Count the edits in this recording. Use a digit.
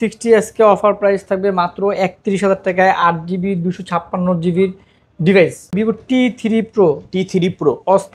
1